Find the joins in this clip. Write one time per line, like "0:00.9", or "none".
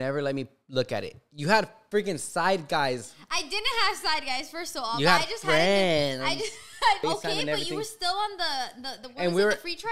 0:07.0